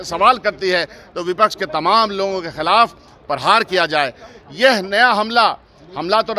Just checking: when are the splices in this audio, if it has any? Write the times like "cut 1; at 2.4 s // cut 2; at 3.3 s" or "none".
none

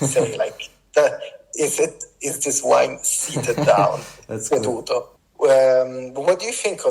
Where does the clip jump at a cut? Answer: cut 1; at 5.2 s

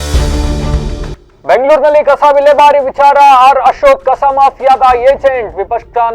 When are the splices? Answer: cut 1; at 1.2 s

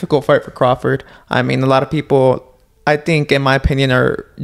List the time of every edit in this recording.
none

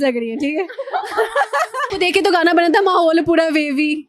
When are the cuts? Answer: cut 1; at 1.9 s

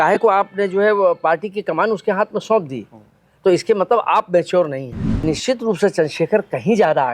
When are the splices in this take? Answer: cut 1; at 5.1 s

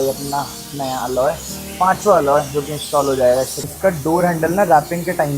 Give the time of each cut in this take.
cut 1; at 3.6 s

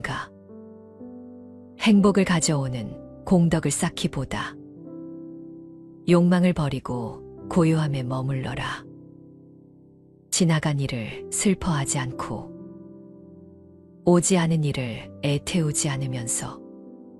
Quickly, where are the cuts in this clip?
none

